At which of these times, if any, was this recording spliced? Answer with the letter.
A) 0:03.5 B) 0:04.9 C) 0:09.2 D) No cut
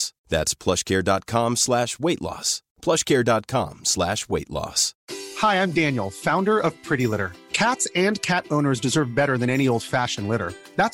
B